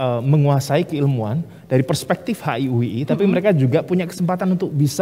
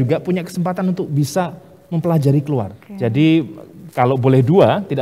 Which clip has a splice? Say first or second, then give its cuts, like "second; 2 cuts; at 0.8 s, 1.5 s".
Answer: second; 1 cut; at 2.8 s